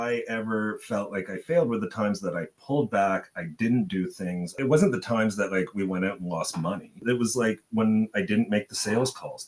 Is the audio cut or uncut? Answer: cut